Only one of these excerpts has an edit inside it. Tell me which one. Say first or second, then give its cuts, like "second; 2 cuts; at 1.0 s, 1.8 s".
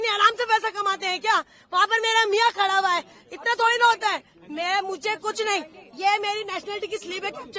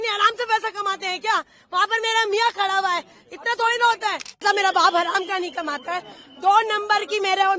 second; 1 cut; at 4.4 s